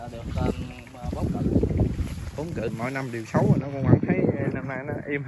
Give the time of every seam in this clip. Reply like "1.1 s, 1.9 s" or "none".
2.7 s

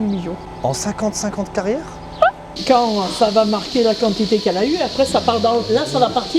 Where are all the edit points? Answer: 2.5 s

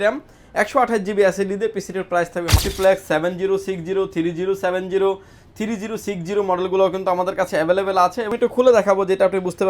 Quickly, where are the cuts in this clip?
2.6 s, 8.3 s

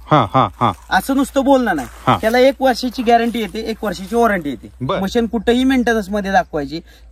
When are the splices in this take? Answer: 4.7 s

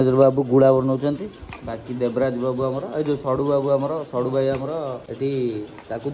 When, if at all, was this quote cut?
5.0 s

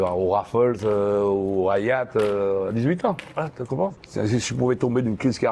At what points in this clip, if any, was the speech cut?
4.0 s

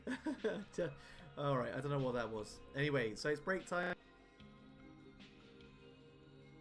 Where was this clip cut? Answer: 4.0 s

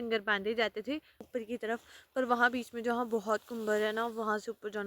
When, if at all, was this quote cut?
1.1 s

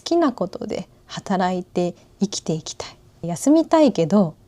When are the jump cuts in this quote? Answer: 3.2 s

